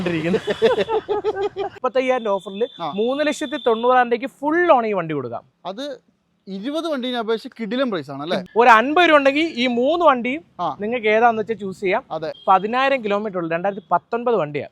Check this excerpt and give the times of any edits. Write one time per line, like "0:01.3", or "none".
0:01.8
0:08.4
0:12.3